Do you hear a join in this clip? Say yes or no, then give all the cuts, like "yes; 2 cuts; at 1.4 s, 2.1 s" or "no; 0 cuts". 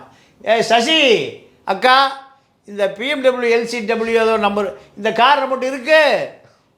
no; 0 cuts